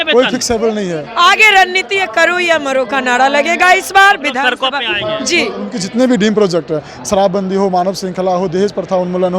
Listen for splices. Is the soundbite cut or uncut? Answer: cut